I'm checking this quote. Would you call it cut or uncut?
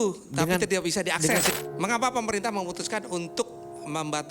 cut